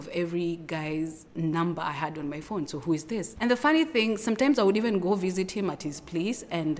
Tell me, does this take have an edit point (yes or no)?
yes